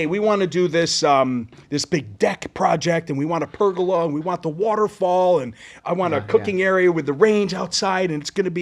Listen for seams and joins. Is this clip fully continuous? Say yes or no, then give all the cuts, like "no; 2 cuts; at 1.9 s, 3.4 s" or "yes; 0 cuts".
yes; 0 cuts